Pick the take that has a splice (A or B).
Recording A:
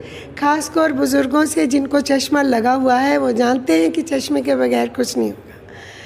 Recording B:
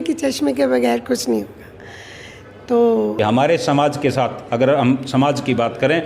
B